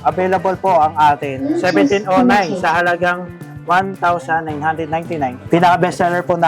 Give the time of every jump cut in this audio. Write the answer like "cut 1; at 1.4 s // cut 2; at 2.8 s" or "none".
cut 1; at 1.5 s // cut 2; at 5.4 s